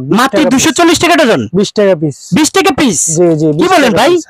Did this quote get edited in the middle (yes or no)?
no